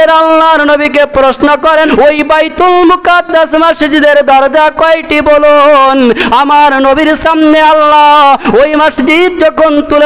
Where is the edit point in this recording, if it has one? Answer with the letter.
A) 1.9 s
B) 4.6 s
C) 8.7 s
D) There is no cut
A